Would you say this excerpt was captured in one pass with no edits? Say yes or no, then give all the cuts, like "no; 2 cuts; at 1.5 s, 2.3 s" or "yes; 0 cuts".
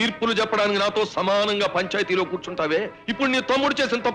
yes; 0 cuts